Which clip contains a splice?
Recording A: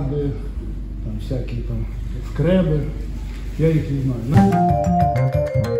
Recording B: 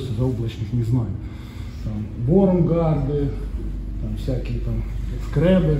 A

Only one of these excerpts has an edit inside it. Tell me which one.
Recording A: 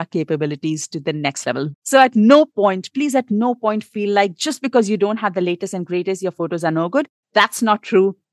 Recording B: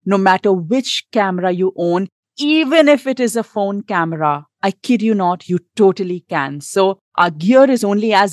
A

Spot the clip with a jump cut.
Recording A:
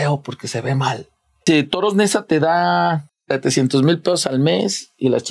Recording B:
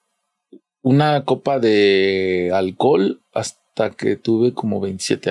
A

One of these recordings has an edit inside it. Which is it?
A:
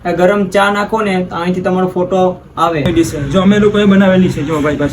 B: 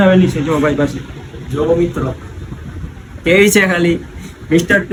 A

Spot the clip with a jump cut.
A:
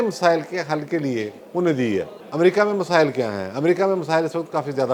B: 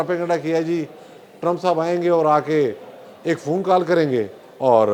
A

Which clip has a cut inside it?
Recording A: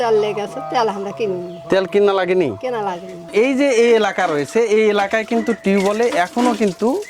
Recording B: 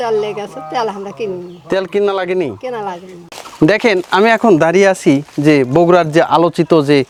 A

